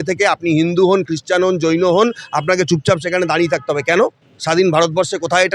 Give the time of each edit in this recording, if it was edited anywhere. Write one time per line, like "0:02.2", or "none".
none